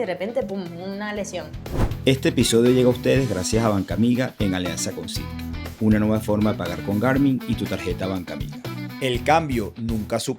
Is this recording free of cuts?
no; 1 cut; at 1.9 s

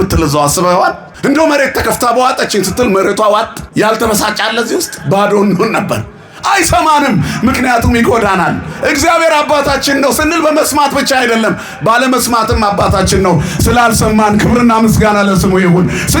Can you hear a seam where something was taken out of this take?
yes; 2 cuts; at 1.1 s, 3.6 s

